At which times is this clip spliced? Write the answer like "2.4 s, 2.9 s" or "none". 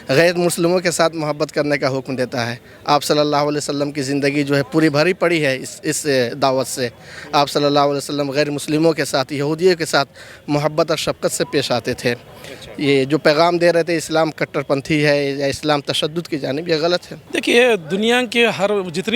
17.2 s